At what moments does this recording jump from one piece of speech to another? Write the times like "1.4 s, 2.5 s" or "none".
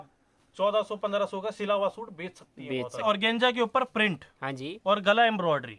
3.0 s

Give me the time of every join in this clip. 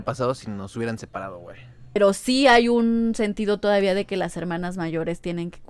2.0 s

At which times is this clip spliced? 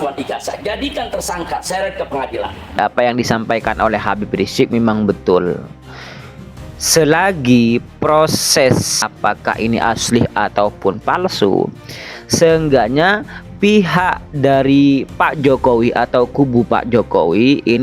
2.8 s, 9.0 s

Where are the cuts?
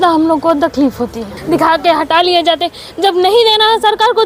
1.3 s

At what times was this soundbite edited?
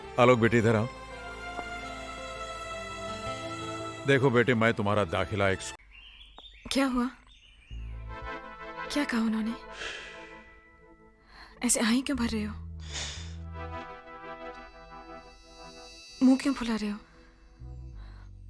5.7 s

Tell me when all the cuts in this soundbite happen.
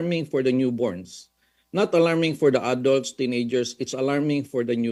none

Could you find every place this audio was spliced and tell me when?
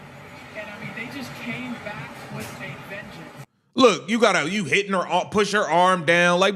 4.5 s

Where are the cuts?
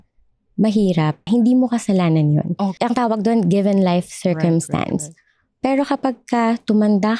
1.2 s, 2.7 s

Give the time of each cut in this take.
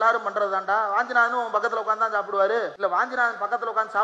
2.7 s

